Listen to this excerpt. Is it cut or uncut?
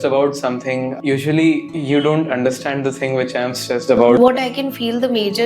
cut